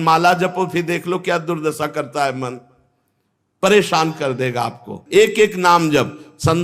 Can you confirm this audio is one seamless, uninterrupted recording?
no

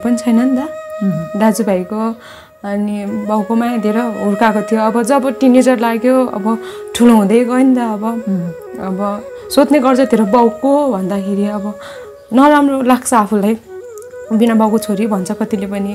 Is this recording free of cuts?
yes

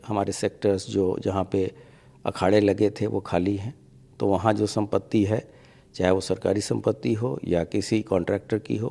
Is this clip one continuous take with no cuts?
yes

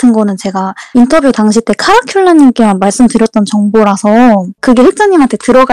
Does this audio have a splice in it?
yes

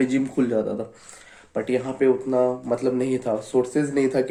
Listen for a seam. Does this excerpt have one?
no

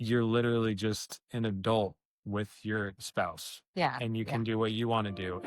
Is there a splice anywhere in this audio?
no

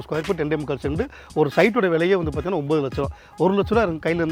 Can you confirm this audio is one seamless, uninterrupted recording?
yes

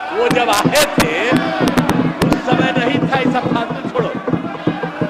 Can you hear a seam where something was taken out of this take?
no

